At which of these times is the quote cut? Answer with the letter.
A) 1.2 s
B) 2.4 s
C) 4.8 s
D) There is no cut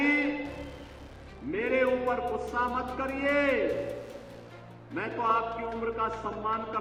D